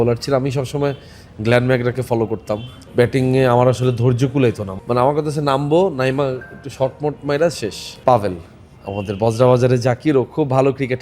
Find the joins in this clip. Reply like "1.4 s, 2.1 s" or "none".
2.8 s, 4.7 s, 7.9 s